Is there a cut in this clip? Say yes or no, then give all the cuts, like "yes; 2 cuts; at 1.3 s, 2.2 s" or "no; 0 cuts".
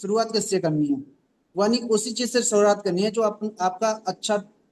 no; 0 cuts